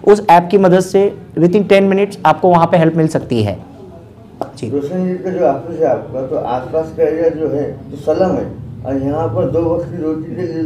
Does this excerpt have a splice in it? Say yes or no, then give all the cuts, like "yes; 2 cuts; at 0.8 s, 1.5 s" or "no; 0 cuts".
no; 0 cuts